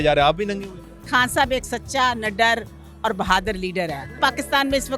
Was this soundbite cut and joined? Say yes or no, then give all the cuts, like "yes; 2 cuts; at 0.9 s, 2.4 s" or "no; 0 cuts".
yes; 2 cuts; at 1.1 s, 4.2 s